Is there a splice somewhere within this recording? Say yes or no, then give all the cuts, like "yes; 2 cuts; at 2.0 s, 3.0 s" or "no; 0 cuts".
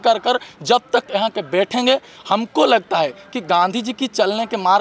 no; 0 cuts